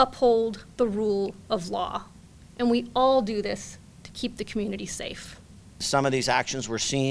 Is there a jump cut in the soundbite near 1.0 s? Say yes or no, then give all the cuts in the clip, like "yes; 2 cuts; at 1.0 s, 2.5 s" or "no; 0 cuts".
no; 1 cut; at 5.8 s